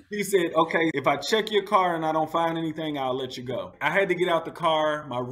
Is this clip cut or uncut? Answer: cut